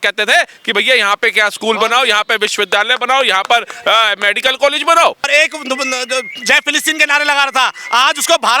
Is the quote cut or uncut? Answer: cut